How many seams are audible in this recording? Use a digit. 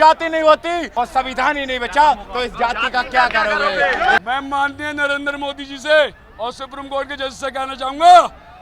2